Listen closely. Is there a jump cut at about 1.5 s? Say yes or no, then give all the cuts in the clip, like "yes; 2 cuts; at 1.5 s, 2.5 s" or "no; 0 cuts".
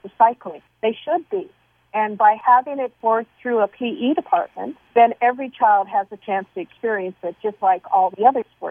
no; 0 cuts